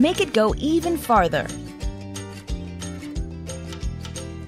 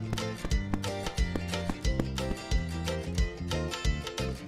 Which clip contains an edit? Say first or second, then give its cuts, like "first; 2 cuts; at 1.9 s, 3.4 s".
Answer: first; 1 cut; at 1.6 s